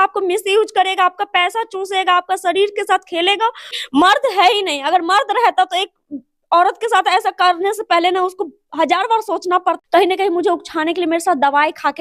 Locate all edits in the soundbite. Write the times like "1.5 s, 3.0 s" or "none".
3.8 s, 9.8 s